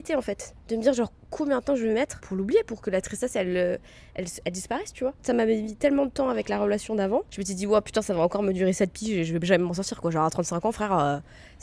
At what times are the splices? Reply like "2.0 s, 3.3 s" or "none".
2.3 s, 5.2 s, 7.4 s